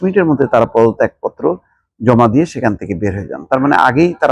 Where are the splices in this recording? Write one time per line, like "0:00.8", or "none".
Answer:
none

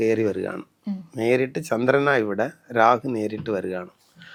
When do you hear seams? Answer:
none

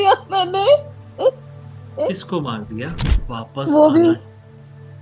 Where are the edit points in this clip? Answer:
0:03.1

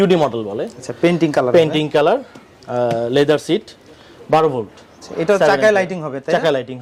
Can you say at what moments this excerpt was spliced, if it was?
none

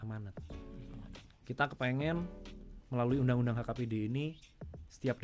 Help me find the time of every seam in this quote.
0:00.9

